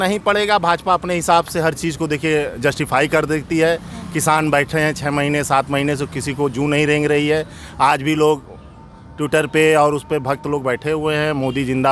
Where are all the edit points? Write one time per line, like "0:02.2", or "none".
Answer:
none